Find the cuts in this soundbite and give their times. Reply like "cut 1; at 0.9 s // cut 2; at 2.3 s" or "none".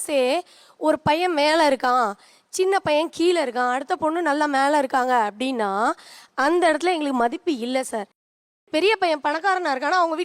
none